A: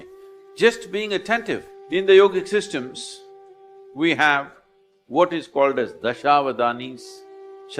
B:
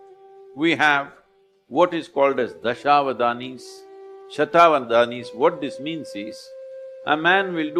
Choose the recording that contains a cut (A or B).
A